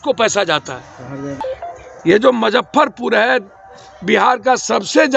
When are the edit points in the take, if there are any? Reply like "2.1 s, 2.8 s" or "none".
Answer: 1.4 s